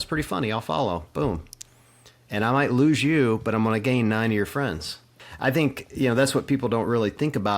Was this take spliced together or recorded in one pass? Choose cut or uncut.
cut